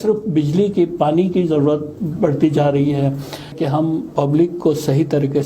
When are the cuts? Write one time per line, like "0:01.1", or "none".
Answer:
0:03.5